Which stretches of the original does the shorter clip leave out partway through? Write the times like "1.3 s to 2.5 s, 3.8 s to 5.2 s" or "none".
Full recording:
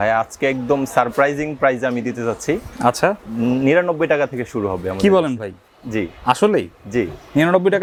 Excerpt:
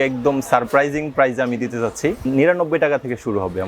2.7 s to 3.5 s